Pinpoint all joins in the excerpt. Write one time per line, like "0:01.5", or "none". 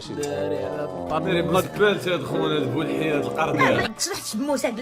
0:03.6